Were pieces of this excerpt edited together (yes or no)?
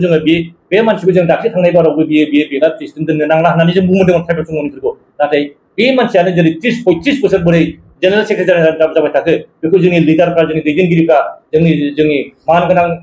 no